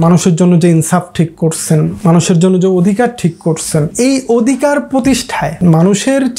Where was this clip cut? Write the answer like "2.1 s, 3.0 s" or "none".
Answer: 2.0 s, 3.9 s, 5.6 s